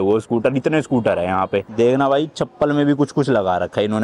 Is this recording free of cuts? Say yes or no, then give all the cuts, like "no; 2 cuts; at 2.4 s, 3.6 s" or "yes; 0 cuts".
no; 1 cut; at 1.7 s